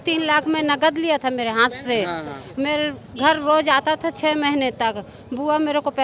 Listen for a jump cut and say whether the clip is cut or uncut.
uncut